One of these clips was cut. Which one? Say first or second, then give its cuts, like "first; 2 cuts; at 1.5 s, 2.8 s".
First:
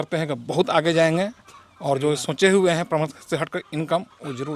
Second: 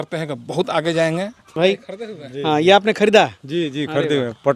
second; 1 cut; at 1.6 s